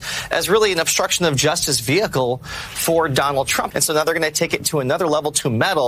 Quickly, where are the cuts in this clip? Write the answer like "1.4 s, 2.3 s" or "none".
3.6 s

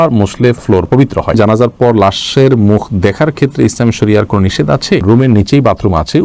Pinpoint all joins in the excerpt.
1.4 s, 5.0 s

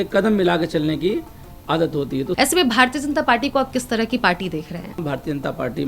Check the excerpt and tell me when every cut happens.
2.4 s, 5.0 s

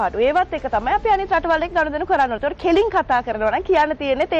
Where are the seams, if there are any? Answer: none

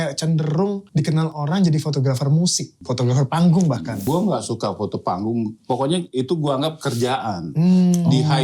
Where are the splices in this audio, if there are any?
0.8 s, 2.8 s, 4.0 s

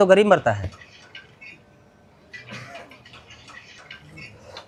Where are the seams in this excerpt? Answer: none

